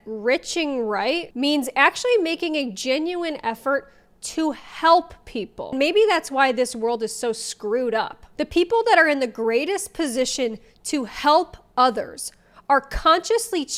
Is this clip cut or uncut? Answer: uncut